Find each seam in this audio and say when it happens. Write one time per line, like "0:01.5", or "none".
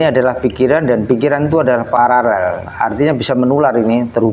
0:02.0